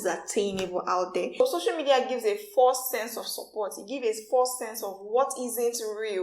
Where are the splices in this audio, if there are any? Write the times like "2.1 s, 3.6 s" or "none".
1.4 s